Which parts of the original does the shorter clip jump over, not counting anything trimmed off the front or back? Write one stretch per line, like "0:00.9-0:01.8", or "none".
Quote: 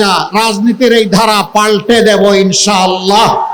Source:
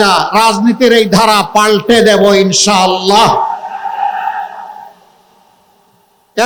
none